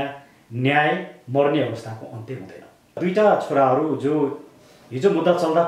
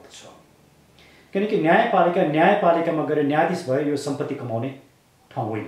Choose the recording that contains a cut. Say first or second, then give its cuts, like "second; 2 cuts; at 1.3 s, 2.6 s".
first; 1 cut; at 3.0 s